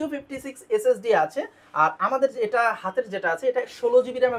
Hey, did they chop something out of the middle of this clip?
no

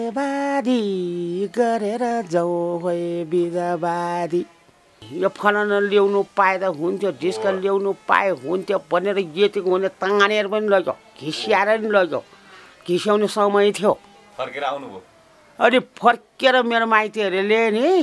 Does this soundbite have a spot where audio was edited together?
yes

